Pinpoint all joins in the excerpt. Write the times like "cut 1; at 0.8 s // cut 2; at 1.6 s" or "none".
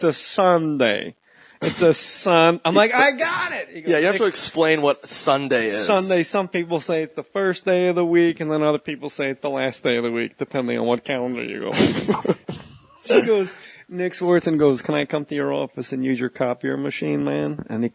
none

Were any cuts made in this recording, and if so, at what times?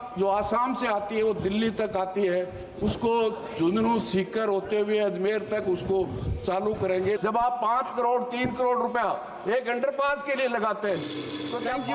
cut 1; at 7.2 s

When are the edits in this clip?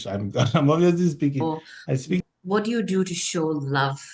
cut 1; at 2.2 s

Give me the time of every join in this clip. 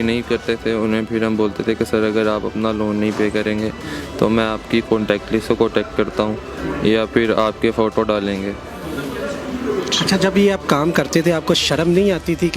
none

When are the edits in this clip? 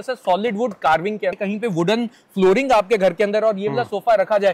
cut 1; at 1.4 s

